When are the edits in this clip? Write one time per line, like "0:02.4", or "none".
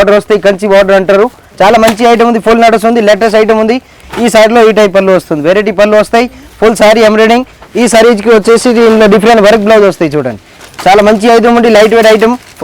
0:01.4
0:04.0
0:07.6
0:10.6